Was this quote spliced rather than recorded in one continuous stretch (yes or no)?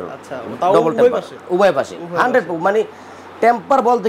no